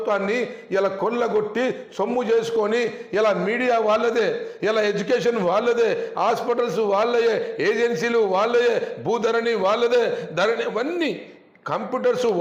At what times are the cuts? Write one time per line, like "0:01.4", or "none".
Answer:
none

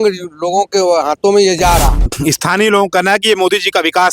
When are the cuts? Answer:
0:02.1

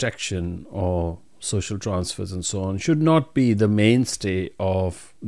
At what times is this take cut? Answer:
none

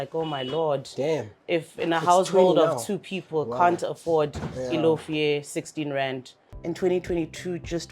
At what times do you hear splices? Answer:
0:06.4

